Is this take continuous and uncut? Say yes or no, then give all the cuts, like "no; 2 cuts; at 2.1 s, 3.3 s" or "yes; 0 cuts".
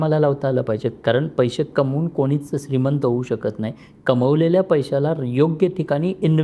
yes; 0 cuts